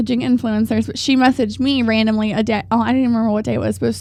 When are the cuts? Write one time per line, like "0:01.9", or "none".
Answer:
none